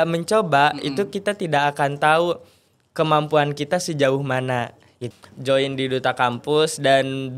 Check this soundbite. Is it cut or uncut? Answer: cut